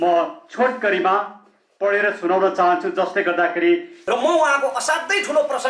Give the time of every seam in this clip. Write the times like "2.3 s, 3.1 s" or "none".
4.0 s